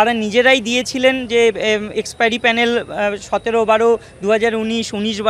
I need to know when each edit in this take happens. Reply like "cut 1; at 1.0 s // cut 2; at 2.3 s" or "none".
none